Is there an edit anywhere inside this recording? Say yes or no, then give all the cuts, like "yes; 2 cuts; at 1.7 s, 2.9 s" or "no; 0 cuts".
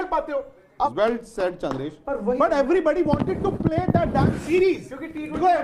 no; 0 cuts